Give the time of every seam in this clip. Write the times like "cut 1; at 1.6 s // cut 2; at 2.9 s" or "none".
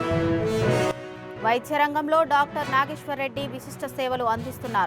cut 1; at 1.0 s